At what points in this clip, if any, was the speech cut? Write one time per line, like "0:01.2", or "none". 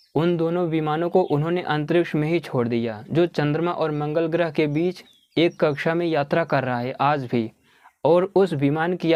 none